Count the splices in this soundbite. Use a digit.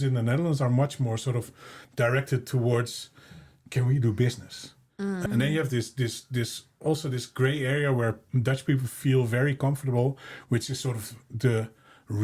1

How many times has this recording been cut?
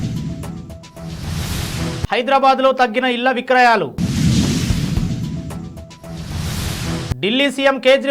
1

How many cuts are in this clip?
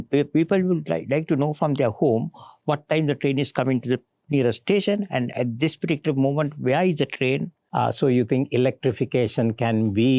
2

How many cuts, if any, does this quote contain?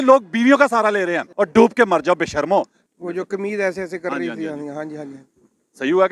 2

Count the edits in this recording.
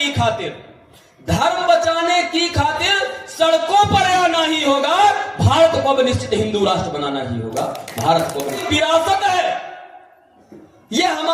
1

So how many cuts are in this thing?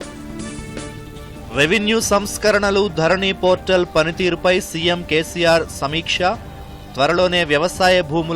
1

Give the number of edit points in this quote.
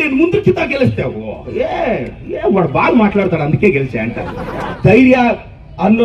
1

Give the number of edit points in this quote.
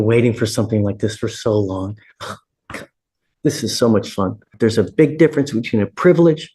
1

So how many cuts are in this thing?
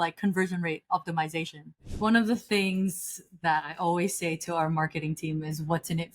1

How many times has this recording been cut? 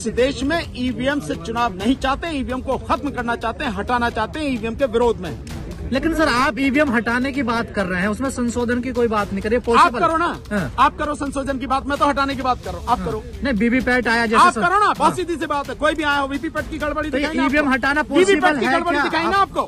0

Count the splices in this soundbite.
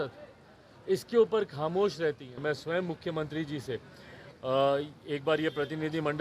1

